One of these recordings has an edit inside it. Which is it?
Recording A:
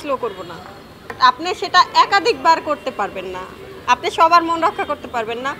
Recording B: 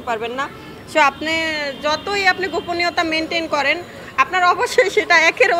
A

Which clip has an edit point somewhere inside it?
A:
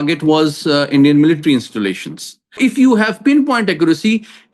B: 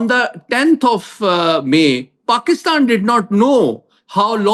A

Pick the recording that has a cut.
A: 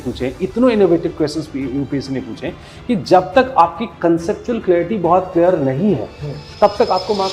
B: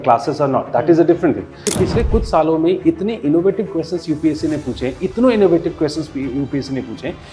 B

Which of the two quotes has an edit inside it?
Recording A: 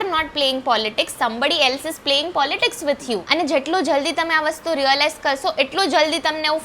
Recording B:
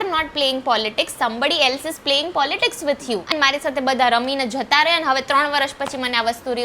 B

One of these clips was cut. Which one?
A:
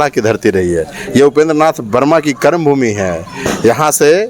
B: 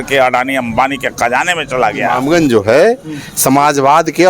B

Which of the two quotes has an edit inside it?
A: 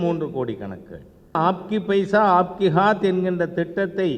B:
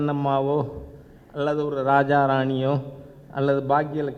A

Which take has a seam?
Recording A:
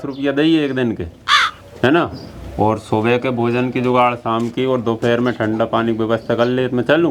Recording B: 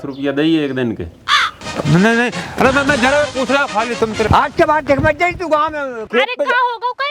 B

